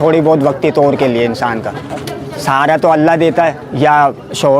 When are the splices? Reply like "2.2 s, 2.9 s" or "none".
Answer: 3.6 s

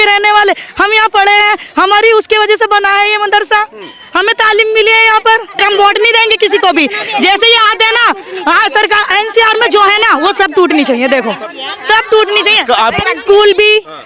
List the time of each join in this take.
5.6 s

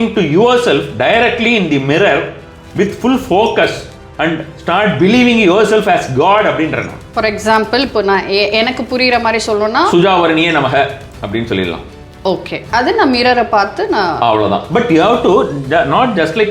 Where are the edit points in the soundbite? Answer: 7.0 s

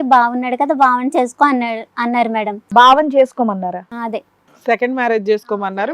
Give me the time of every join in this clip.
2.6 s

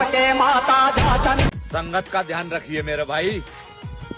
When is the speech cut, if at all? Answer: 1.6 s

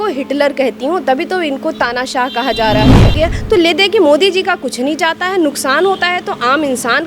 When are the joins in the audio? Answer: 3.1 s

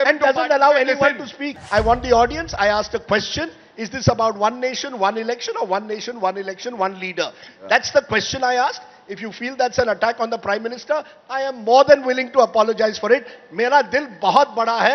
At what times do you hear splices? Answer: 1.5 s

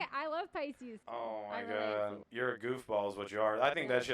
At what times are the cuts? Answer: 0.9 s, 2.2 s

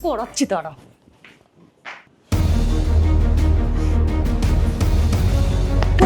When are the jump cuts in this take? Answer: 2.1 s

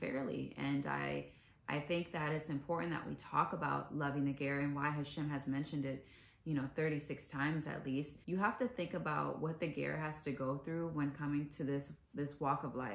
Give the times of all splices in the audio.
8.2 s

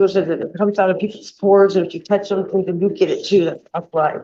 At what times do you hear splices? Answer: none

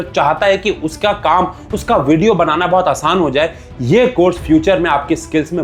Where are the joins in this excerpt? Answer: none

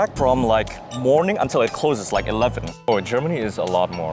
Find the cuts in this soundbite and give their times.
2.9 s

